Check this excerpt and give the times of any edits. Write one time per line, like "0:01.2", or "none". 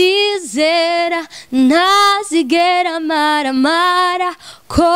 none